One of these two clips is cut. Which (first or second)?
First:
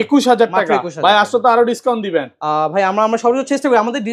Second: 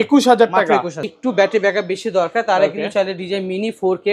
second